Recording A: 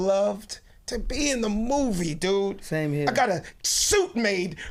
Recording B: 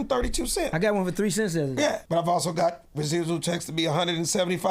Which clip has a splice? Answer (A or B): B